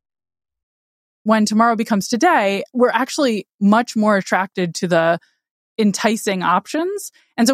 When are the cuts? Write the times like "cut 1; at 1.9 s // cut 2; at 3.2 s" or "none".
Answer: cut 1; at 1.2 s // cut 2; at 2.7 s